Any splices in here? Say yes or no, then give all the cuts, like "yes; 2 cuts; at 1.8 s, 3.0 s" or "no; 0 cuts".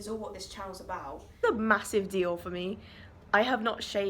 yes; 1 cut; at 1.4 s